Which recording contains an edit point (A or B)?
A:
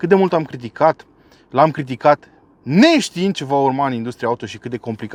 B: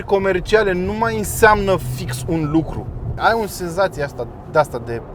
B